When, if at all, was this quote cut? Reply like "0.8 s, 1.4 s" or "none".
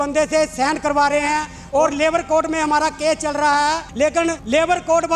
1.5 s, 4.1 s